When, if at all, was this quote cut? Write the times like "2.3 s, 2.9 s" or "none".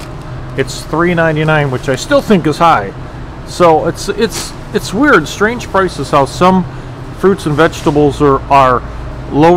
none